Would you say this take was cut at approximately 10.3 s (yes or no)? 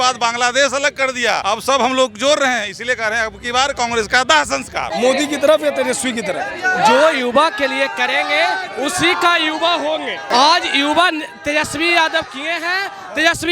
yes